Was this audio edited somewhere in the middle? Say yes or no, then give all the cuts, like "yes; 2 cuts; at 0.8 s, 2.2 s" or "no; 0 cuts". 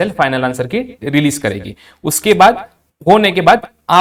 no; 0 cuts